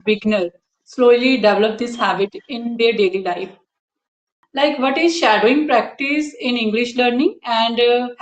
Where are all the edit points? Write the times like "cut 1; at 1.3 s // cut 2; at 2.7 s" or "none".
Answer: cut 1; at 4.7 s